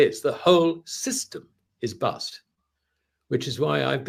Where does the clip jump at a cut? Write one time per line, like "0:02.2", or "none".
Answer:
none